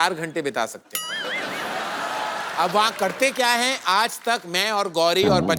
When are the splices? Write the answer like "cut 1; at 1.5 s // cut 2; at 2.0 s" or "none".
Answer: none